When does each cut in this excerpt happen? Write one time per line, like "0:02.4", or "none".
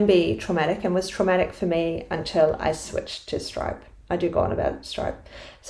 none